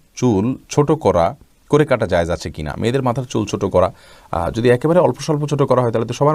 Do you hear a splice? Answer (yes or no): no